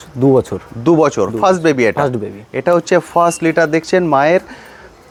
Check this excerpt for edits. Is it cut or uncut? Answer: uncut